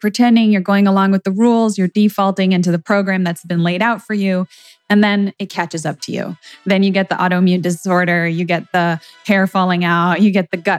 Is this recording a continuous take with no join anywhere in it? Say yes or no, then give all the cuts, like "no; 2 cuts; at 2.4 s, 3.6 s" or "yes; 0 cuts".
yes; 0 cuts